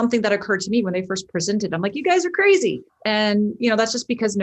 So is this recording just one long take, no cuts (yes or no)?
no